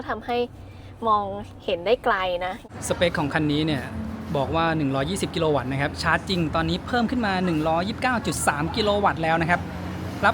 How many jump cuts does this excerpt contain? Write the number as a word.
one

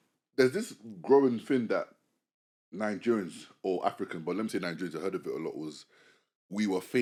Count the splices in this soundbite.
zero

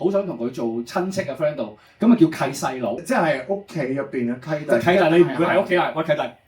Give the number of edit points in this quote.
two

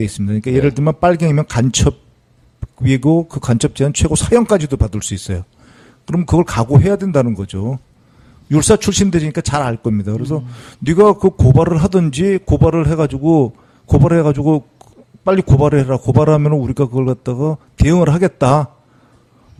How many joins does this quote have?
zero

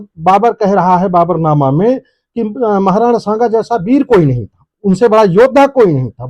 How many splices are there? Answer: zero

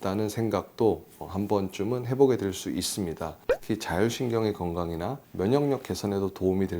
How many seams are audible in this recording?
one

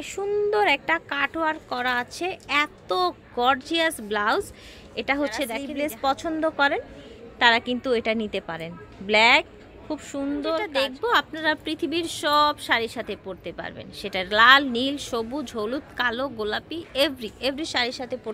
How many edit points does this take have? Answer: two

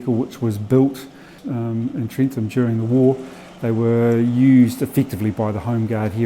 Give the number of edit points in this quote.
one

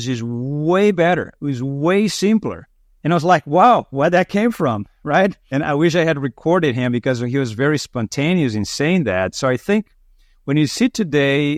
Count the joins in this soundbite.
zero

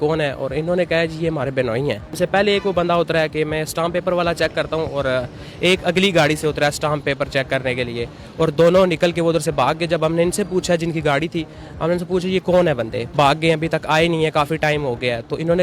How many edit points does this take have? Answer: two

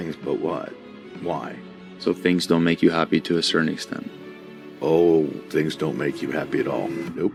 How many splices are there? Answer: zero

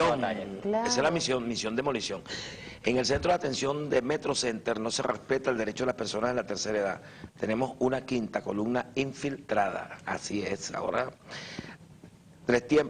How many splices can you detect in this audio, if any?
one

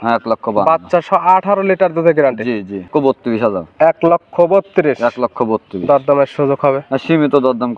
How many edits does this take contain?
one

